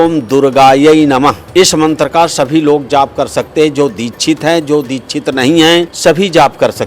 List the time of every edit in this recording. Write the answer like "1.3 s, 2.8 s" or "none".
1.4 s, 5.9 s